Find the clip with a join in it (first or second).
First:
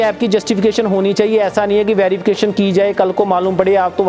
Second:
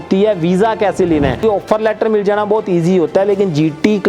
second